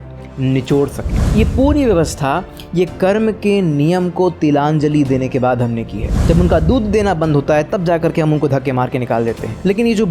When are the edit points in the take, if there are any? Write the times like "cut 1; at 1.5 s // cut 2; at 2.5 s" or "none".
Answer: cut 1; at 1.2 s // cut 2; at 6.1 s